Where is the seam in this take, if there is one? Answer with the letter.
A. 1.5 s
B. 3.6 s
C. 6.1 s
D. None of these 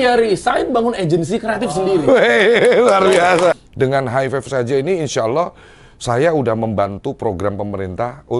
B